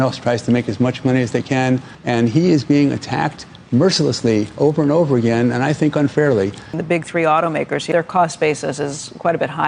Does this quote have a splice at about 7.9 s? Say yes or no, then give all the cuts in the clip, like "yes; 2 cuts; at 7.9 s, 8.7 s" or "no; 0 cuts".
yes; 3 cuts; at 1.9 s, 6.8 s, 7.9 s